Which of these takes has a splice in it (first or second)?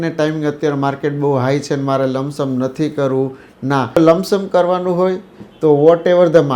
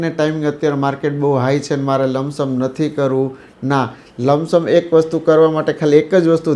first